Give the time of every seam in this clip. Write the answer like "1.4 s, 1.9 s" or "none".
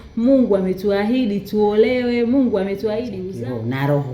3.2 s